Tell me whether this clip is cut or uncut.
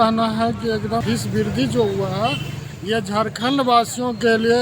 cut